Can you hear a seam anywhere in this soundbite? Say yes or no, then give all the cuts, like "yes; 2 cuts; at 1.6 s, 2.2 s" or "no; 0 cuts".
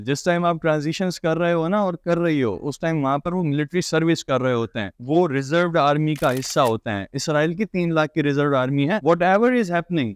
yes; 2 cuts; at 5.0 s, 9.0 s